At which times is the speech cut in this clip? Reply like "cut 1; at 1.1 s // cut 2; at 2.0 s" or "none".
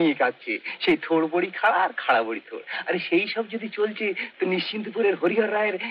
none